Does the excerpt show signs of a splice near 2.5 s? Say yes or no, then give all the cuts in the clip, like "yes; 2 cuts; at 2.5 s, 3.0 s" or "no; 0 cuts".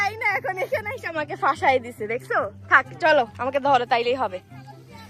no; 0 cuts